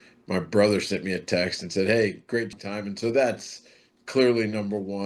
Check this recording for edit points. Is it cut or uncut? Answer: cut